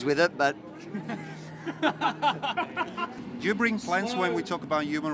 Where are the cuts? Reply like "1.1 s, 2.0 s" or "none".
3.2 s